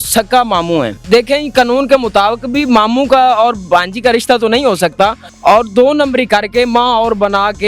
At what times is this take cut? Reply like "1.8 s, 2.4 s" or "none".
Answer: 1.0 s, 5.3 s